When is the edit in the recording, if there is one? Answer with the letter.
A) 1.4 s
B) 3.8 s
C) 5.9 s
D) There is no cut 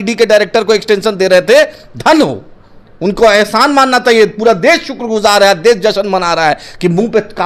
D